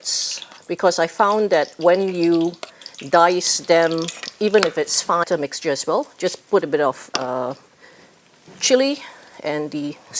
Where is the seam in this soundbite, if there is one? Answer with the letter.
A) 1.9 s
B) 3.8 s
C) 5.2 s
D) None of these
C